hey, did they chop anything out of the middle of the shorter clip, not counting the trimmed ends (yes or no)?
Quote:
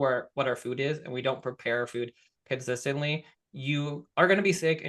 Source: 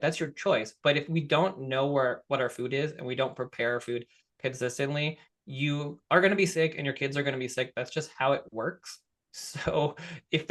no